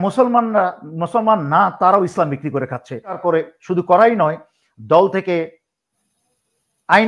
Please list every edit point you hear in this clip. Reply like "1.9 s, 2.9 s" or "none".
3.2 s